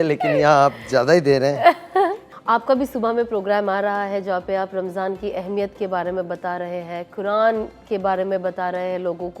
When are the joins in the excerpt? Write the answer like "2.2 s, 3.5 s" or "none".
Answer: none

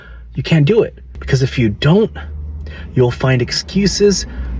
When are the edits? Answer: 1.2 s

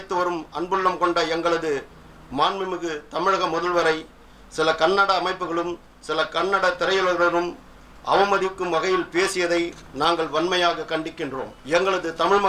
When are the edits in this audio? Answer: 11.5 s

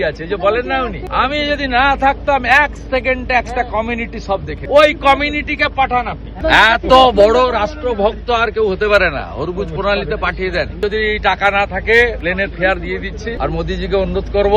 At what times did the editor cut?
1.0 s, 4.5 s, 6.4 s, 10.8 s, 12.2 s, 13.4 s

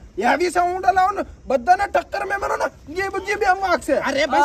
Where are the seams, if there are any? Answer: none

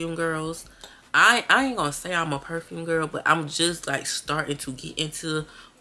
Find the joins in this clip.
none

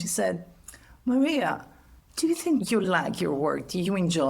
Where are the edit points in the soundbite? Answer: 2.9 s

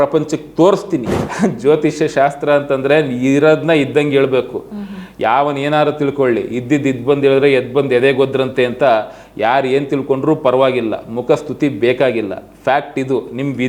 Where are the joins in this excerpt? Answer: 1.2 s

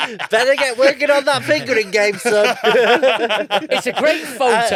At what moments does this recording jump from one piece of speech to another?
none

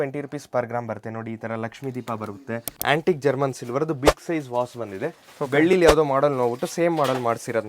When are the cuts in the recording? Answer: 2.7 s

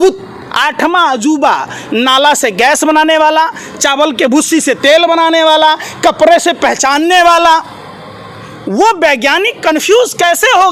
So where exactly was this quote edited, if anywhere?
none

